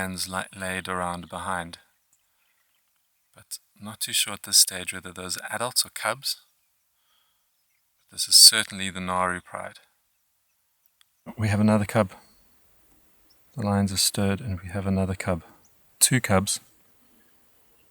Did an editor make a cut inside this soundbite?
yes; 1 cut; at 11.1 s

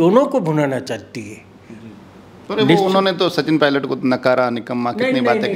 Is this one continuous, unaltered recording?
yes; 0 cuts

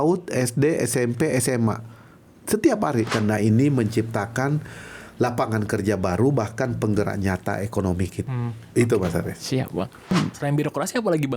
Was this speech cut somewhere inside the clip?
yes; 2 cuts; at 3.1 s, 10.1 s

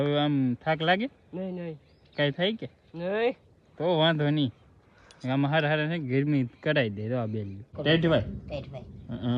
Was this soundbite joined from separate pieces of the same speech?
yes; 1 cut; at 7.7 s

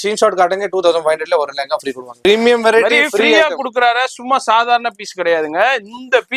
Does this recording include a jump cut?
yes; 1 cut; at 2.2 s

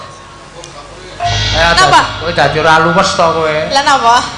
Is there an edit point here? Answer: yes; 1 cut; at 1.3 s

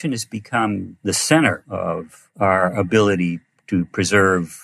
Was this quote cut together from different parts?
yes; 2 cuts; at 0.9 s, 1.9 s

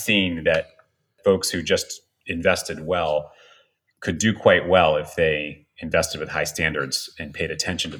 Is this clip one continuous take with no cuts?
no; 1 cut; at 1.1 s

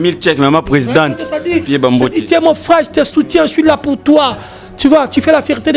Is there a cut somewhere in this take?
no; 0 cuts

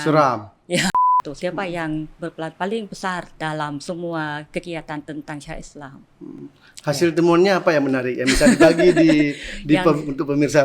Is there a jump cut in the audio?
yes; 2 cuts; at 0.9 s, 3.3 s

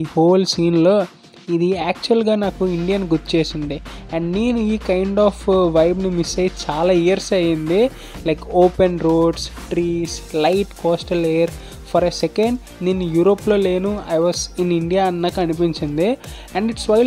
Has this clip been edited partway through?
no; 0 cuts

